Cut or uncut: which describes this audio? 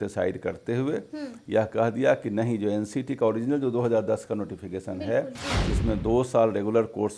uncut